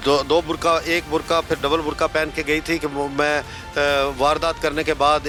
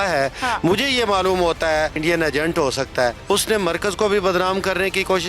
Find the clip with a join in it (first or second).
second